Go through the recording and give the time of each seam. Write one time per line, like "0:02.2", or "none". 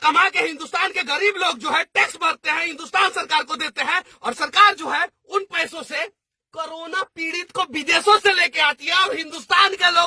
none